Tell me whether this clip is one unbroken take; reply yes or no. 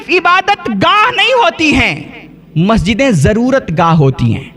yes